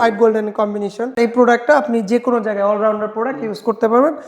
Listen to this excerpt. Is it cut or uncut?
cut